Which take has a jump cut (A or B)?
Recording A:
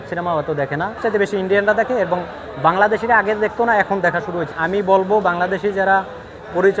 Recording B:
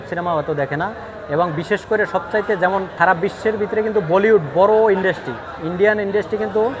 A